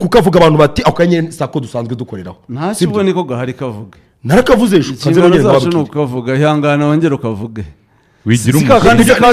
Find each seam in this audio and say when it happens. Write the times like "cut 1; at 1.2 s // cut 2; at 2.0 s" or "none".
none